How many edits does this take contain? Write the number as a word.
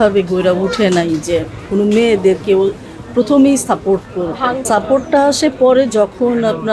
one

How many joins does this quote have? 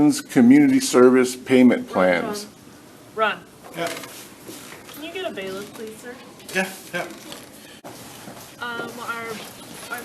one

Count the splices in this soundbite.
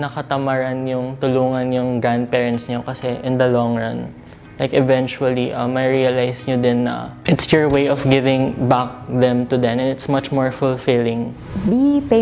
zero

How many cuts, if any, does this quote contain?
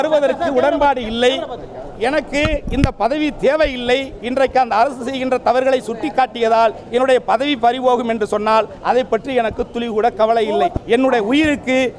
two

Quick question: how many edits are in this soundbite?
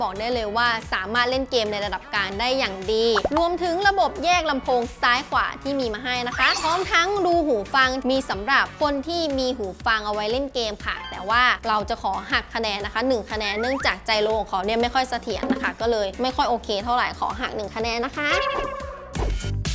zero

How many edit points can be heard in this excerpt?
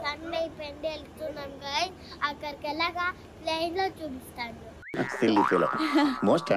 zero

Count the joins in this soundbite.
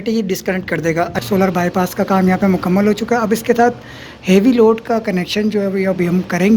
one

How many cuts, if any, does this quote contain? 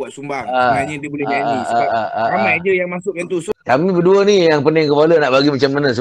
one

